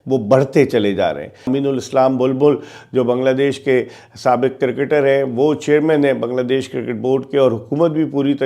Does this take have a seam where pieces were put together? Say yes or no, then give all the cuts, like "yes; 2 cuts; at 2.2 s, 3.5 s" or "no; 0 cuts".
yes; 1 cut; at 1.4 s